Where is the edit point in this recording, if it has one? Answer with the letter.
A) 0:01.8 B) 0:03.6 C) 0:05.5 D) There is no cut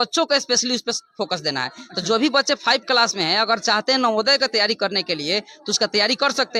D